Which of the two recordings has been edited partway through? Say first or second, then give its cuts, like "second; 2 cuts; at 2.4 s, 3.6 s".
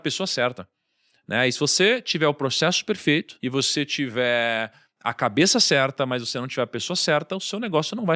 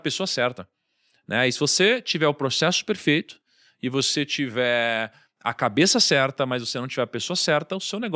first; 1 cut; at 3.3 s